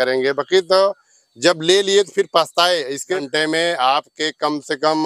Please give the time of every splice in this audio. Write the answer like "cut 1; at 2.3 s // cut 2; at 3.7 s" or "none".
cut 1; at 3.2 s